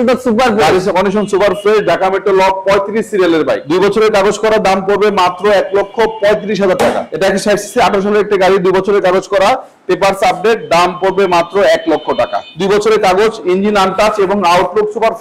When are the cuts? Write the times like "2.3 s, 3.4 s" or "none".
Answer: 3.6 s, 7.1 s, 12.5 s

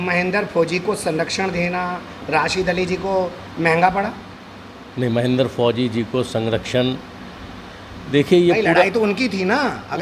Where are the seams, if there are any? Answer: none

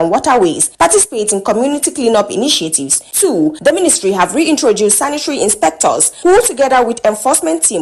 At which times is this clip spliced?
none

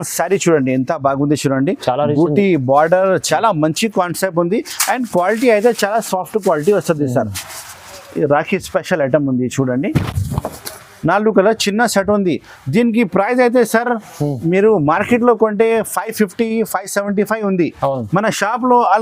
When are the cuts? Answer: none

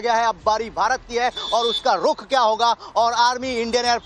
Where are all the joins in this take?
1.4 s

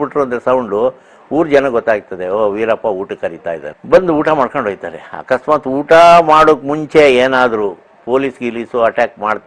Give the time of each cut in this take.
3.7 s

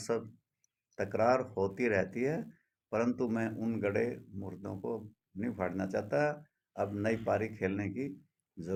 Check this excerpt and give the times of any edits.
none

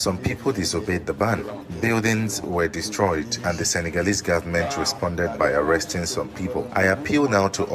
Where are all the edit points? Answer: 1.6 s, 6.7 s

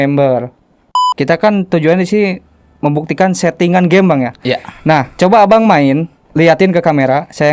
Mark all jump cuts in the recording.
1.0 s, 6.2 s

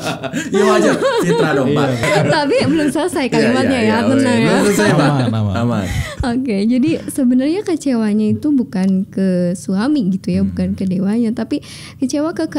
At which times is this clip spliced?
2.0 s

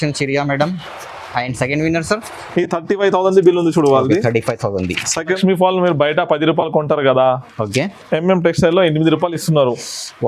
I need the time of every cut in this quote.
5.4 s

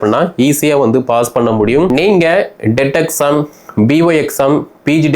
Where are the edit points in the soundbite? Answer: 1.9 s

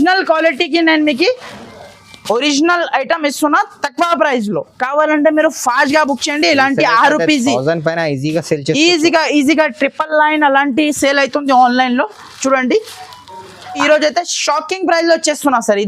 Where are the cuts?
13.8 s

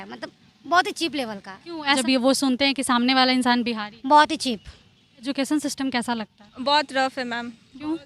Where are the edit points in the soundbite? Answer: 2.0 s, 5.3 s

